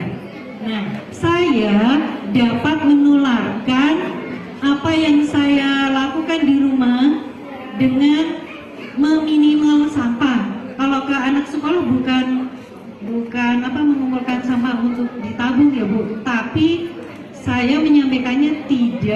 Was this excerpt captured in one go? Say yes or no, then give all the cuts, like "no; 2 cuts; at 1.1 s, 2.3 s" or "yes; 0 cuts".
yes; 0 cuts